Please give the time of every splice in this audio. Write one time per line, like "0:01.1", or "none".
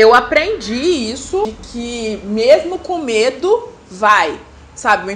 0:01.5